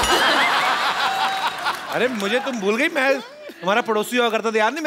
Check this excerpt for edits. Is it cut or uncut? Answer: uncut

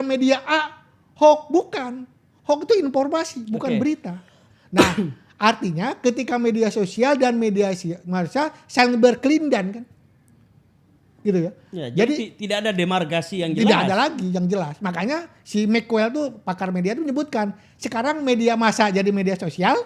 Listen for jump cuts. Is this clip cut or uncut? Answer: uncut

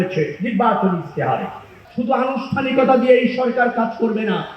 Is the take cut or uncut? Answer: cut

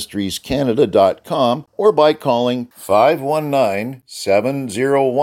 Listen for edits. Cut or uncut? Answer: cut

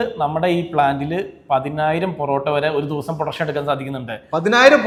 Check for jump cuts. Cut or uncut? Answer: uncut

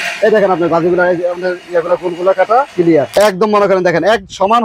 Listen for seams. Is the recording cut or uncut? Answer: cut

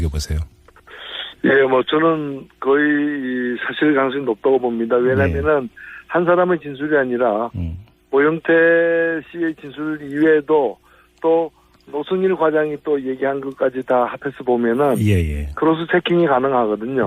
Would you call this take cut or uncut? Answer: cut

